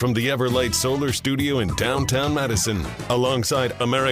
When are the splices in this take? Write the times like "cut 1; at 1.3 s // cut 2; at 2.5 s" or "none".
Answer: none